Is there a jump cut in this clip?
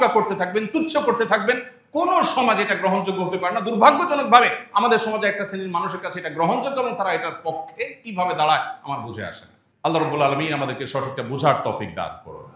no; 0 cuts

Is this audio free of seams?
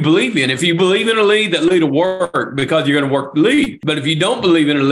no; 1 cut; at 3.8 s

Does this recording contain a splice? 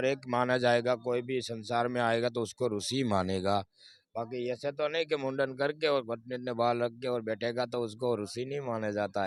no; 0 cuts

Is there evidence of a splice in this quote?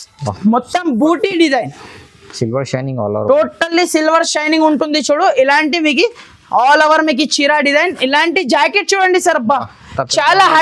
no; 0 cuts

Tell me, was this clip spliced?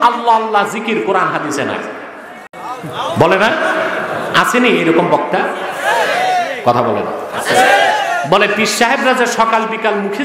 no; 0 cuts

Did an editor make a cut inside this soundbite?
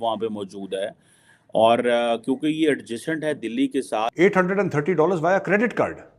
yes; 1 cut; at 4.1 s

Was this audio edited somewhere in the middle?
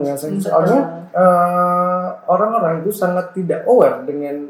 no; 0 cuts

